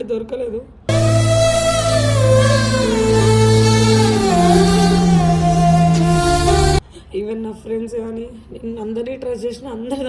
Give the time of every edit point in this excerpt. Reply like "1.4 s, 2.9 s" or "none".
none